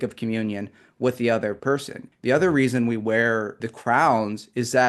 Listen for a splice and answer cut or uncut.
cut